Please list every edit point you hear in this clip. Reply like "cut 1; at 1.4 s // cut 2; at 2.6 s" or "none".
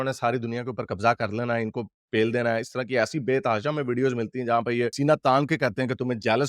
none

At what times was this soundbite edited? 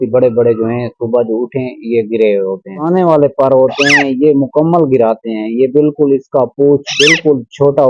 cut 1; at 2.8 s

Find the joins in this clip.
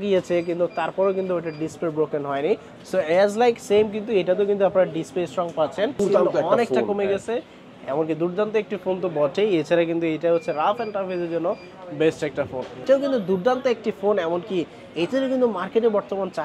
cut 1; at 6.0 s // cut 2; at 12.8 s

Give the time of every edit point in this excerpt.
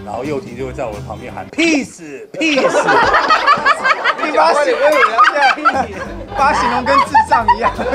none

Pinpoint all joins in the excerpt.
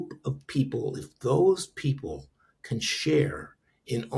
none

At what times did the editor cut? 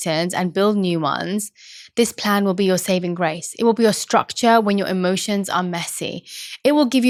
none

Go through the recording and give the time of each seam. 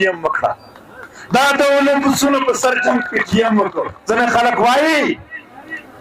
cut 1; at 3.9 s

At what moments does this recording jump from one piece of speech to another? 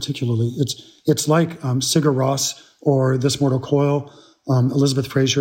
none

